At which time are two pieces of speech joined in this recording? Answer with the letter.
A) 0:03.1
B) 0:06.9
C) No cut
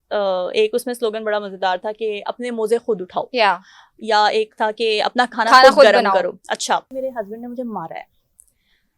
B